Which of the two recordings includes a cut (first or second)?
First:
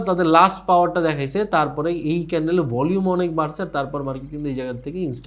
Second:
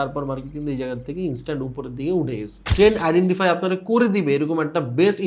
second